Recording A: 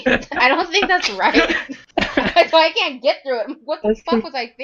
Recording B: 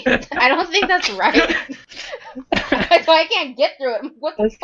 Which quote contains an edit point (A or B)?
A